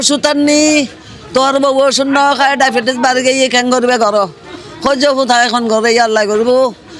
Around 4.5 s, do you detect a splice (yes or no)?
no